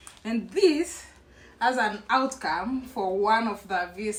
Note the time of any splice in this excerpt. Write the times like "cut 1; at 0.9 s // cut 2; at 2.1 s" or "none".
none